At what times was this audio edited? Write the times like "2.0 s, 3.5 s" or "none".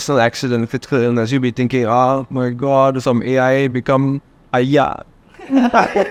none